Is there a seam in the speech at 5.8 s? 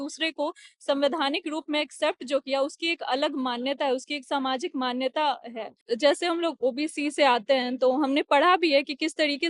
yes; 1 cut; at 5.8 s

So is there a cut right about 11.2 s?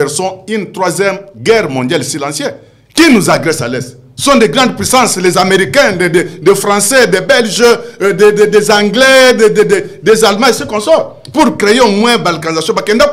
no; 0 cuts

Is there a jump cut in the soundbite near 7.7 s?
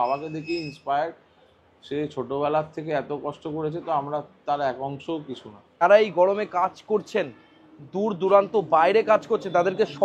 no; 1 cut; at 5.7 s

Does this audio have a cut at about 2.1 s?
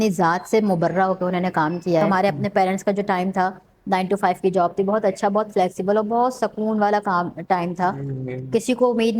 yes; 1 cut; at 2.1 s

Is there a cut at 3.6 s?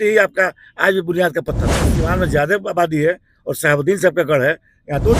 no; 1 cut; at 2.0 s

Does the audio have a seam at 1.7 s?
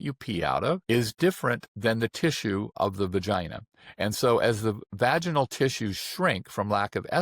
yes; 3 cuts; at 0.8 s, 1.7 s, 2.8 s

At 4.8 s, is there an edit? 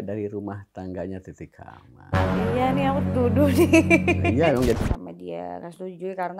yes; 1 cut; at 4.8 s

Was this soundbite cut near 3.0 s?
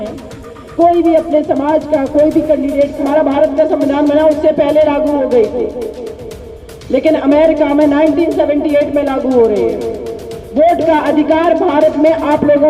yes; 1 cut; at 3.0 s

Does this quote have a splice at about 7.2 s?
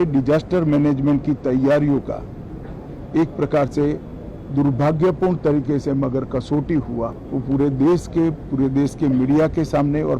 yes; 1 cut; at 7.2 s

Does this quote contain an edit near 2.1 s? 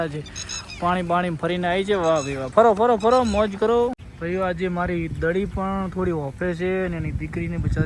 no; 1 cut; at 4.1 s

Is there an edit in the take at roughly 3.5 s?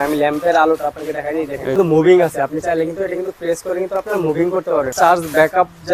no; 2 cuts; at 1.7 s, 4.9 s

